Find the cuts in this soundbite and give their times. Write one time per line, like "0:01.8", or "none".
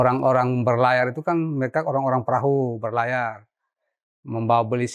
none